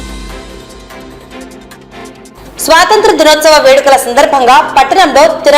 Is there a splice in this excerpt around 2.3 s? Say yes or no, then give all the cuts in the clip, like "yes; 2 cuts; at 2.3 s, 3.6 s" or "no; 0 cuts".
yes; 1 cut; at 2.3 s